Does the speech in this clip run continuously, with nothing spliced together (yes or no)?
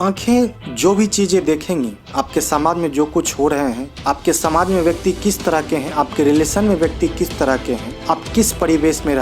no